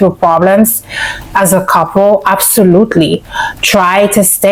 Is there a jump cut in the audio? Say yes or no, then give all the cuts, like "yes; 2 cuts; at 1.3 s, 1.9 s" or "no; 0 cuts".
no; 0 cuts